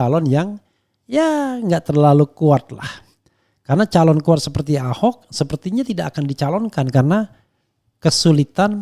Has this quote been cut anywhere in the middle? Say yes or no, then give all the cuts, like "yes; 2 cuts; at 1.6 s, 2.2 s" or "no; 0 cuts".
no; 0 cuts